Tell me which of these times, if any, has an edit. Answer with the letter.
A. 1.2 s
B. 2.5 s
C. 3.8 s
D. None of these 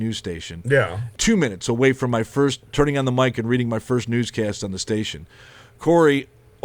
A